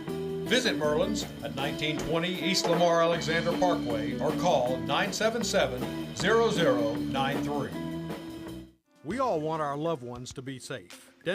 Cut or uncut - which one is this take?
cut